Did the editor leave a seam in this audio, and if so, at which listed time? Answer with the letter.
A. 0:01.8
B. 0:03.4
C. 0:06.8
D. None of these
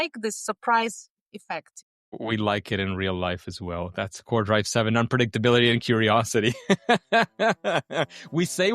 A